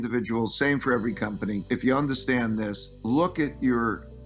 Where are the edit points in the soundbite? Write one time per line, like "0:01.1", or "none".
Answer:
0:01.6
0:02.9